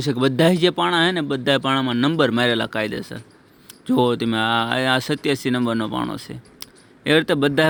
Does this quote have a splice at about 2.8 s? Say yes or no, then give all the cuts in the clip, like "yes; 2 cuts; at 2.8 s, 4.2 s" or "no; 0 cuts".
no; 0 cuts